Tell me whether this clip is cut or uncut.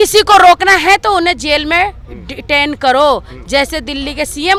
uncut